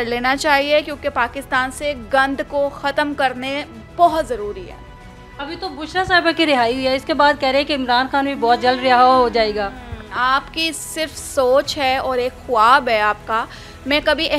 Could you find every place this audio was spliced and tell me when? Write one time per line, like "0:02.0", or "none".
none